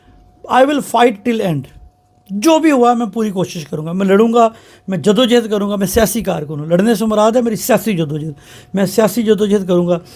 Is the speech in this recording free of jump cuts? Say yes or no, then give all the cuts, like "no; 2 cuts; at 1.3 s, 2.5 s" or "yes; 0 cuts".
yes; 0 cuts